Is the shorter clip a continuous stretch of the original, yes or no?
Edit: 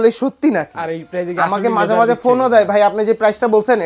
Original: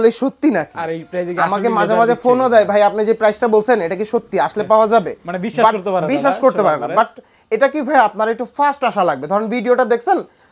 yes